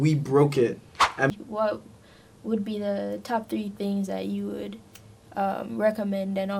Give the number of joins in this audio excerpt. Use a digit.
1